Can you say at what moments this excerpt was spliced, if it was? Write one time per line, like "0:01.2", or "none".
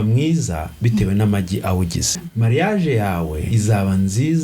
0:02.2
0:03.4